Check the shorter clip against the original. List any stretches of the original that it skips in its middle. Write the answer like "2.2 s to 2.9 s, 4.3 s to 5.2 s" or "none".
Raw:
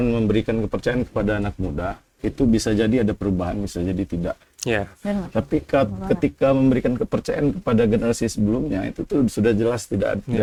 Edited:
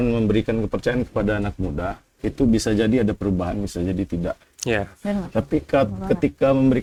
none

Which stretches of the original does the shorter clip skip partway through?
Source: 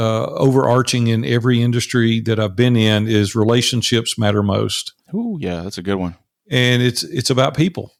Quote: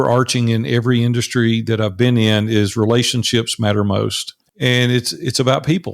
4.9 s to 6.3 s

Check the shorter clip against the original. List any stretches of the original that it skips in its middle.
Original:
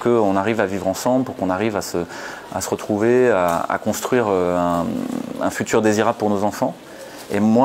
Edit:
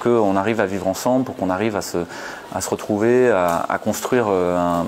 none

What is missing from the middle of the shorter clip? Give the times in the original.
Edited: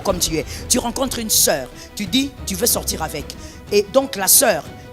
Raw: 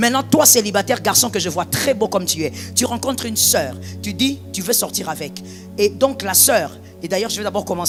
none

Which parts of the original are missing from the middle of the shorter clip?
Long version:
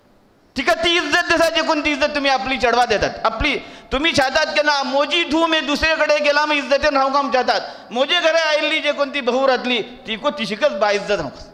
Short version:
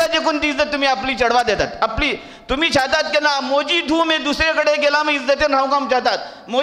none

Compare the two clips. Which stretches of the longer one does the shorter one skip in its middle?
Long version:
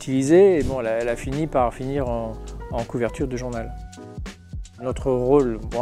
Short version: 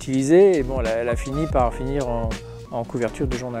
none

